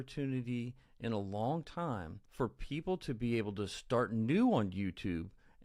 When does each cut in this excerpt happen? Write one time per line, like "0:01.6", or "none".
0:02.2